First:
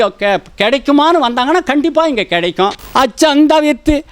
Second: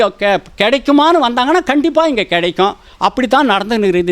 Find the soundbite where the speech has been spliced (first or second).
first